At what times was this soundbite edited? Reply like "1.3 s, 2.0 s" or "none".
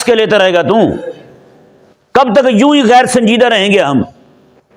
none